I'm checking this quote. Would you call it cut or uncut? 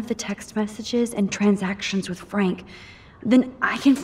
cut